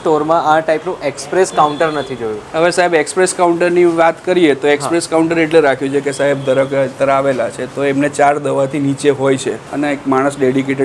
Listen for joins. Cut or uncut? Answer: cut